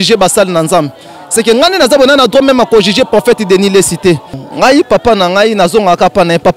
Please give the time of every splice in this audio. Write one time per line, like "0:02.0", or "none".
0:04.4